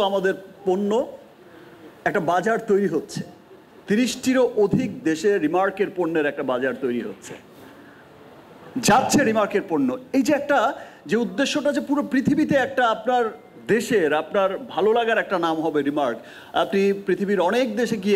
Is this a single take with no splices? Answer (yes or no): yes